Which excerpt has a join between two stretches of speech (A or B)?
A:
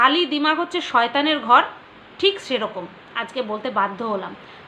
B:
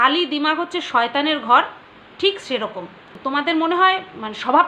B